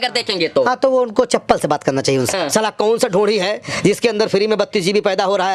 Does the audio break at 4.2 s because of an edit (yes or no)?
no